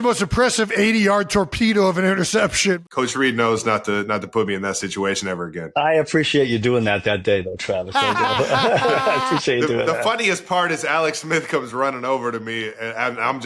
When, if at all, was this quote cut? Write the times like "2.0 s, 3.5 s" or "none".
2.8 s, 5.6 s